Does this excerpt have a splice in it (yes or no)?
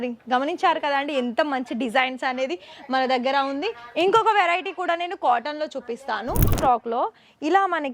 yes